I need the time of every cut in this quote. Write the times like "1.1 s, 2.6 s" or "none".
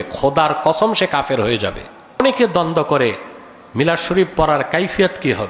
2.2 s